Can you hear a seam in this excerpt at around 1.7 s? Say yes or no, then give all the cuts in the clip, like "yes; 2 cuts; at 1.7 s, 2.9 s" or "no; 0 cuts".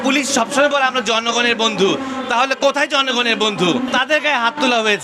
no; 1 cut; at 3.9 s